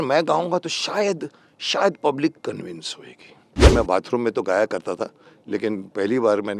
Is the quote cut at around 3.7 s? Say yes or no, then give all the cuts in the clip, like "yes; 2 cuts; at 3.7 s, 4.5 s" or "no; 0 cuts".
yes; 1 cut; at 3.7 s